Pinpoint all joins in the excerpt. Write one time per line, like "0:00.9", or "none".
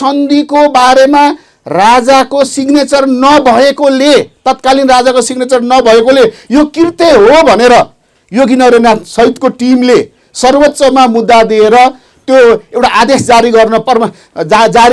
none